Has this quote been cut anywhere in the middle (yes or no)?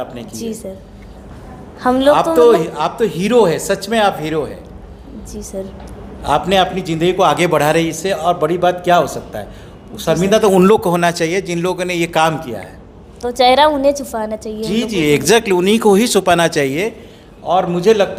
no